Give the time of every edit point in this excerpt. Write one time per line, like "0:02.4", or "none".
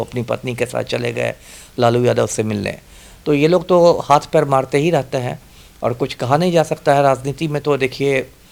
none